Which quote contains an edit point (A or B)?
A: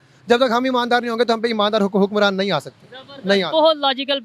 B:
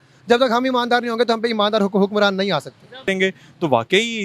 B